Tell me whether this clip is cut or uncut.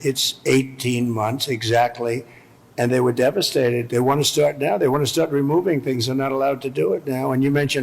uncut